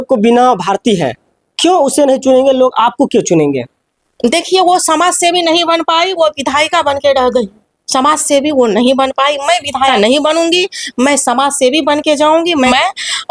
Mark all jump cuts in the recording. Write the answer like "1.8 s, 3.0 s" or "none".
none